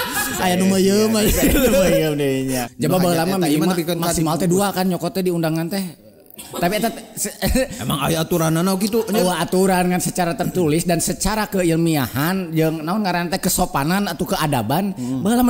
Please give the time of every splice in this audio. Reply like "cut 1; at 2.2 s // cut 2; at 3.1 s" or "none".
cut 1; at 2.7 s